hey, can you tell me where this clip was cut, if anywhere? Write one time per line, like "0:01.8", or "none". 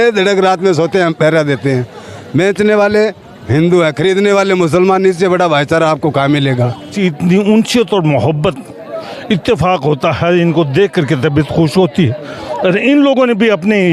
0:06.9